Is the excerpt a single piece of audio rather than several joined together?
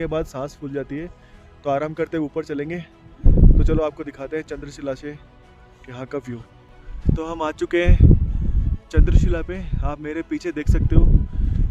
yes; 0 cuts

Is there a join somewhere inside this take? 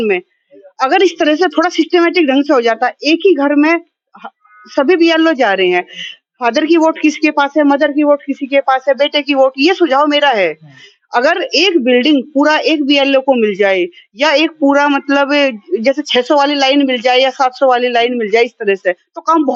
no; 0 cuts

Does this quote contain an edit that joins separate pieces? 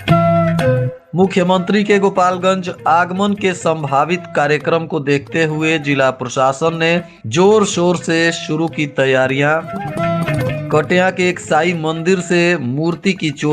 yes; 1 cut; at 1.0 s

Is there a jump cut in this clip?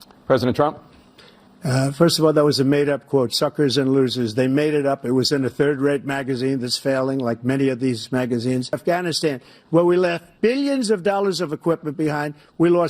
yes; 1 cut; at 8.8 s

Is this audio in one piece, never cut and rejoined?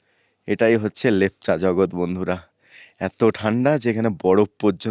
yes; 0 cuts

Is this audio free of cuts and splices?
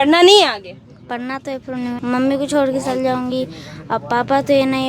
no; 1 cut; at 2.0 s

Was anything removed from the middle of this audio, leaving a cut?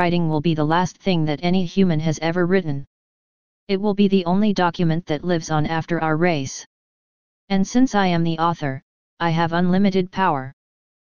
yes; 1 cut; at 1.2 s

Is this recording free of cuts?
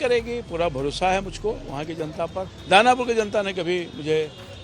no; 1 cut; at 2.5 s

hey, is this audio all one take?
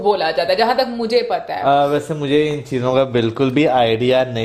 yes; 0 cuts

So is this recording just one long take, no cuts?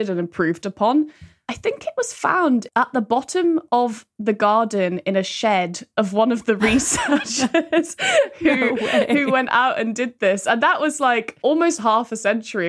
no; 2 cuts; at 2.7 s, 11.4 s

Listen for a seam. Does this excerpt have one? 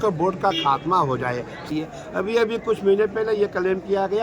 yes; 1 cut; at 1.7 s

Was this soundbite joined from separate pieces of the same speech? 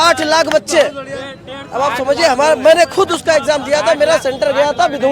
no; 0 cuts

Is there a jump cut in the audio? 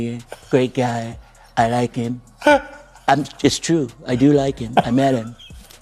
no; 0 cuts

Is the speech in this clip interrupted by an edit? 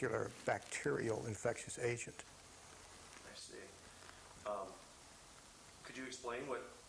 no; 0 cuts

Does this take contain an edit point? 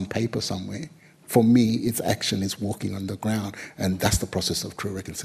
no; 0 cuts

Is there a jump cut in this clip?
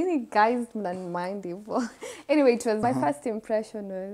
yes; 1 cut; at 2.8 s

